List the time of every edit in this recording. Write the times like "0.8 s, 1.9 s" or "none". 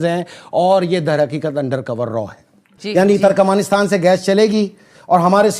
2.8 s